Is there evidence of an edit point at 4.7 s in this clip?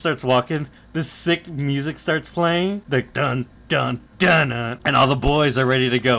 yes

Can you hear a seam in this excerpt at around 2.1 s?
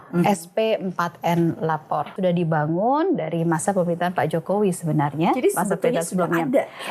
yes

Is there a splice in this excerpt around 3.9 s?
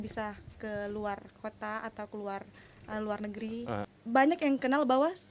yes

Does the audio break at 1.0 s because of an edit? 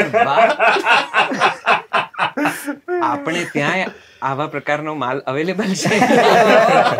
no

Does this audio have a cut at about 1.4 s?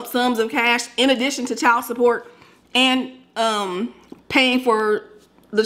no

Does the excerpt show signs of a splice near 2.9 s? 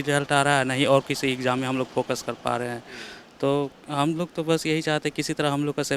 no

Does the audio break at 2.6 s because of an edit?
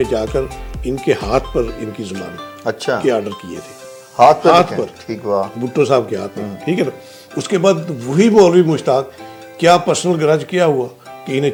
no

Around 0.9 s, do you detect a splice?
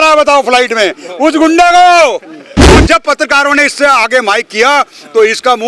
no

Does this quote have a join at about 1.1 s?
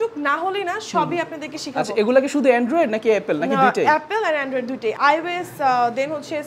no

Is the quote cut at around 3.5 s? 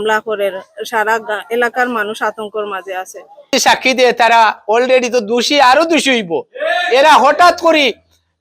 yes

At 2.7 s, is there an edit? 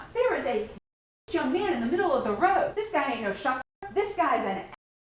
yes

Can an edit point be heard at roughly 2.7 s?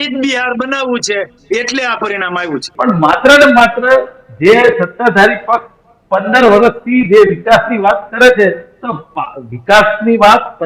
yes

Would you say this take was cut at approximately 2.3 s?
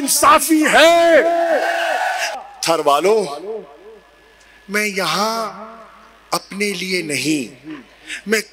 yes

